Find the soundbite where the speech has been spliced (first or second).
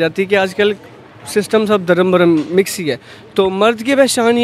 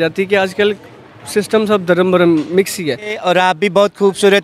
second